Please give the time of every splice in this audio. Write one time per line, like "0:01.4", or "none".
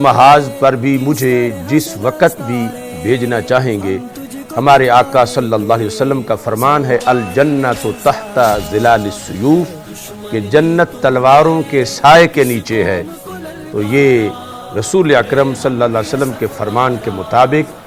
none